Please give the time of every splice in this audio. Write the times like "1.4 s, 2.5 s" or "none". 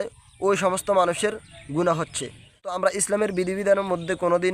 2.7 s